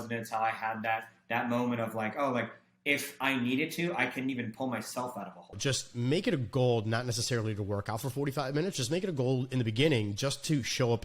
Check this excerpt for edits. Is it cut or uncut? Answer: cut